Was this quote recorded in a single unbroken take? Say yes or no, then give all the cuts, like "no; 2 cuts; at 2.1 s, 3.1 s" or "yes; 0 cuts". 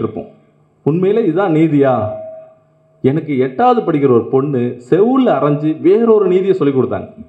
yes; 0 cuts